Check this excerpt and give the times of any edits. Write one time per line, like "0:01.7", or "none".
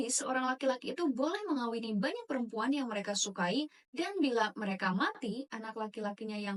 none